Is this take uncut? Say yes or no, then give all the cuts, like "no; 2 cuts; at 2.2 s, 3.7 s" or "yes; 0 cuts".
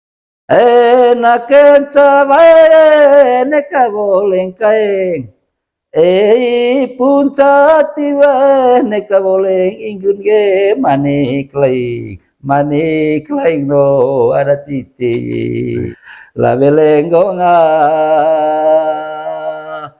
no; 1 cut; at 15.9 s